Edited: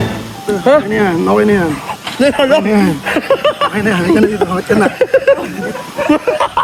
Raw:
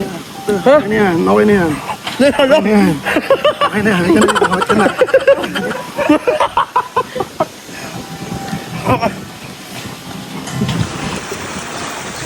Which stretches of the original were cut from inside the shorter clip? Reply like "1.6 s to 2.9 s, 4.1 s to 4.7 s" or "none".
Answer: none